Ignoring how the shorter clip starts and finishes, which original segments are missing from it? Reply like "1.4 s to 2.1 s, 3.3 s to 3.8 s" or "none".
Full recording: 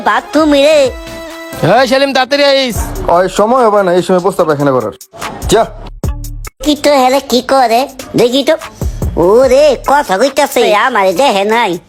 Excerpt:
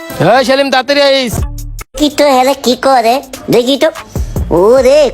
2.9 s to 6.1 s